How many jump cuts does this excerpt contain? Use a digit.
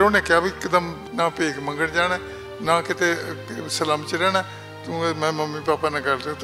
1